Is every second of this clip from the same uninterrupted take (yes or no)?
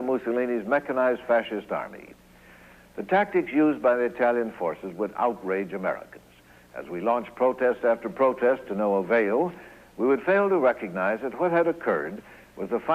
no